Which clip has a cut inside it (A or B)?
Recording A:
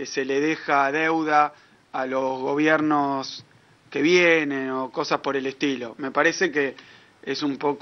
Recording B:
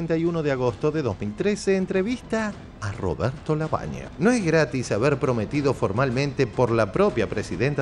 B